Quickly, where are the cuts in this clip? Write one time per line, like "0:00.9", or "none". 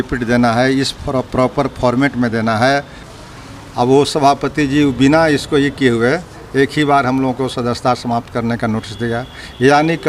0:03.1